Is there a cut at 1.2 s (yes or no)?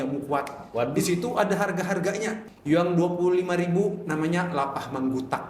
no